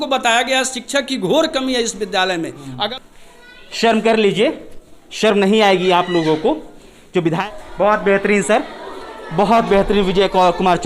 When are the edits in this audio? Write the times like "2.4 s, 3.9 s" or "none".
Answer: 2.9 s, 7.4 s